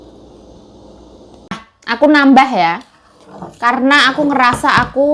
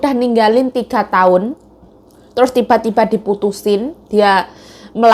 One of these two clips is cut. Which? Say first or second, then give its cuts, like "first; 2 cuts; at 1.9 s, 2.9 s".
first; 1 cut; at 1.3 s